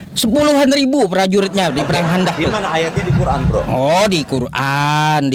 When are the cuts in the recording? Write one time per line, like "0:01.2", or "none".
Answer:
none